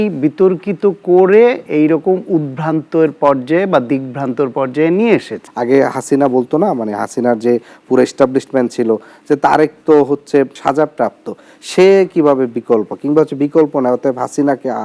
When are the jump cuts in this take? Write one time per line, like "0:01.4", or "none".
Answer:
0:05.4